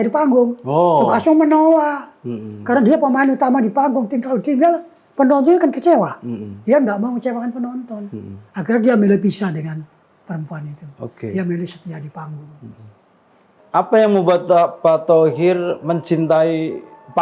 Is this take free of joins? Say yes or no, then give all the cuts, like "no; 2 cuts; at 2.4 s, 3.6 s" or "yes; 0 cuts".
no; 1 cut; at 13.5 s